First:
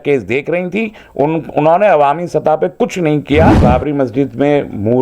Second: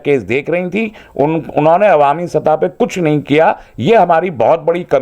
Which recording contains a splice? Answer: first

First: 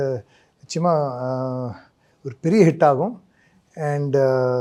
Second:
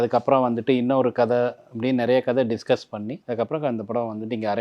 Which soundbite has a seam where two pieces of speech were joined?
second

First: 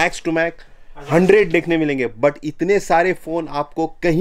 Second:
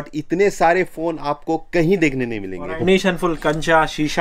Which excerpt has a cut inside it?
second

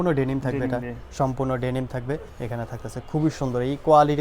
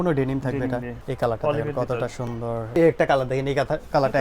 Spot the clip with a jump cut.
second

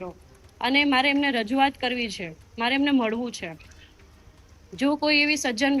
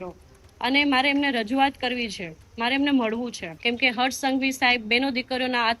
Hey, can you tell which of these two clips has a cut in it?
second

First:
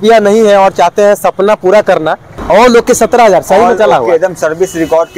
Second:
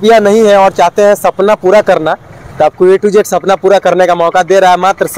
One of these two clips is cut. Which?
first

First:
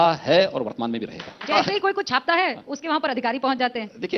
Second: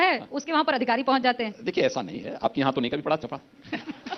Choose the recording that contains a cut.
first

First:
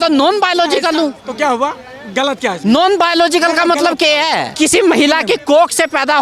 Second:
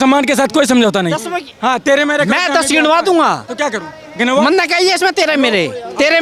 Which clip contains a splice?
first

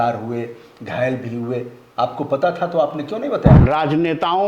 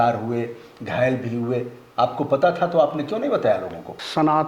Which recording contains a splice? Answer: first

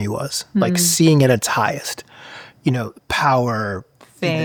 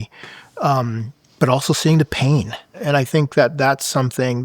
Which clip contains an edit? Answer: second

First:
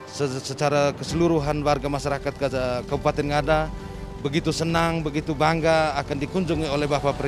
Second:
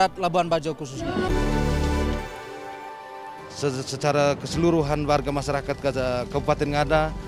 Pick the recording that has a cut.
second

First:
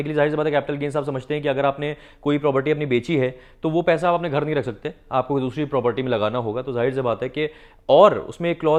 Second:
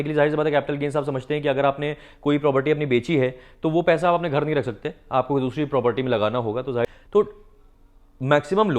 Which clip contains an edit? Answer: second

